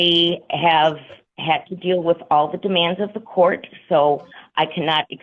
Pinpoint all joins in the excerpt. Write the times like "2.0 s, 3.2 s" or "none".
none

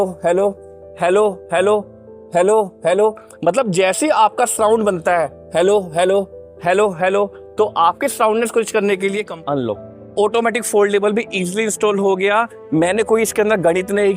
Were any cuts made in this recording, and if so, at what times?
9.3 s

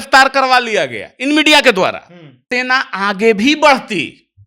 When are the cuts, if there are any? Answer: 2.4 s

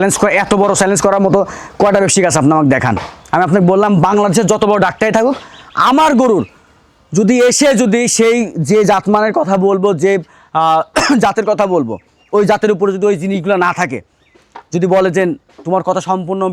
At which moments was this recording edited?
none

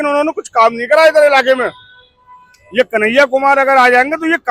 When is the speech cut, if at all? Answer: none

